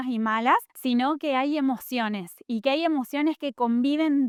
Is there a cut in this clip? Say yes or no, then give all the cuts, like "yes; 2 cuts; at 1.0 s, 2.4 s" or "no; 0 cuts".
no; 0 cuts